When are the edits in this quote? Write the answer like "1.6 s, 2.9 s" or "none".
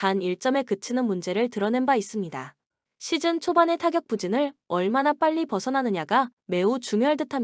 none

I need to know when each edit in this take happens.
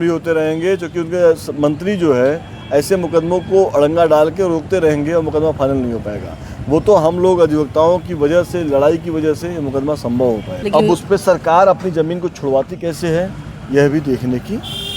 10.5 s

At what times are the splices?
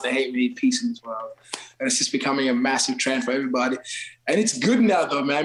none

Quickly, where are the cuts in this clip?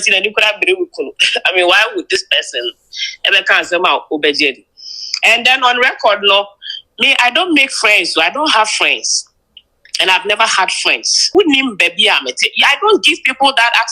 11.3 s

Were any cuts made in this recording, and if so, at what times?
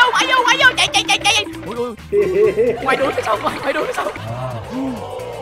2.9 s, 4.3 s

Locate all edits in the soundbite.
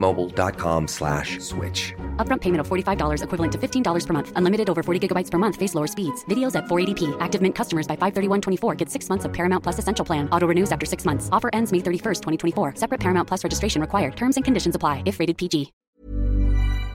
16.0 s

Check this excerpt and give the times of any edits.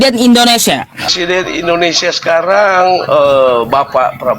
1.1 s

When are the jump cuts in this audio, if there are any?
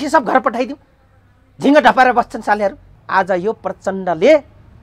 2.9 s

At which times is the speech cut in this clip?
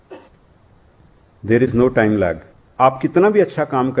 2.6 s

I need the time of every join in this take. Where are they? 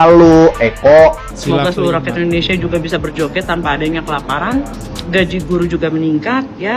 1.3 s

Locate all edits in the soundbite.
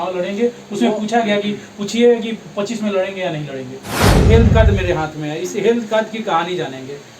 4.3 s

